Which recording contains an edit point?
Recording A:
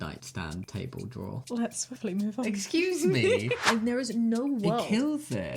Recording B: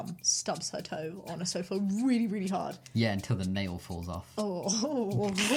A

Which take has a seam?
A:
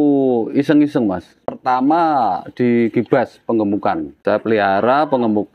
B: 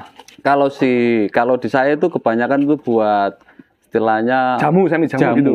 A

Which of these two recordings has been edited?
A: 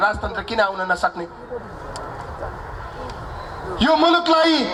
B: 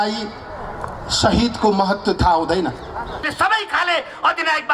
B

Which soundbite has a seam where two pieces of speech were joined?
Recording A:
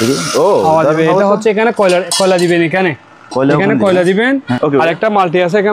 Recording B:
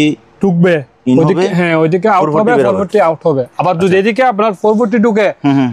A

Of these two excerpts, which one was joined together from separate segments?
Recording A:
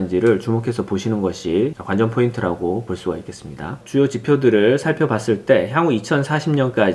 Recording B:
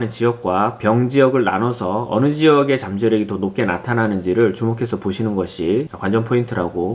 A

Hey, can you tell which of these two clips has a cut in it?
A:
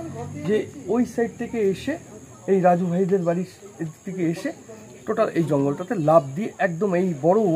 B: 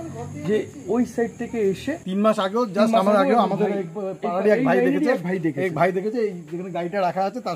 B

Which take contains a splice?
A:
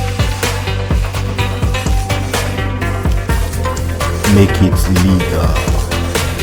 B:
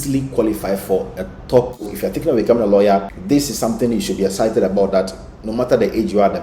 B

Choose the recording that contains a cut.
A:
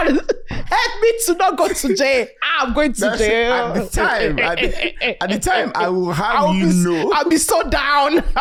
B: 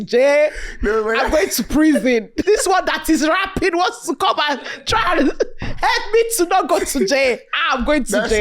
B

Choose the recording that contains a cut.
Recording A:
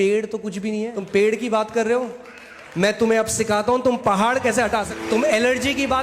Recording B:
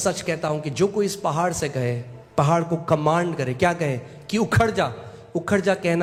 A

